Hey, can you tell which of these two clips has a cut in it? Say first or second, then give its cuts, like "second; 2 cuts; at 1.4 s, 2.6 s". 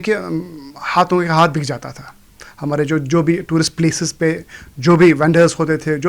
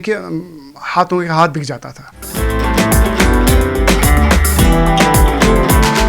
second; 1 cut; at 2.3 s